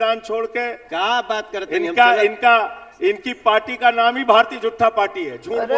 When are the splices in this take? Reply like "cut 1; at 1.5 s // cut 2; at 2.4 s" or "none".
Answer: none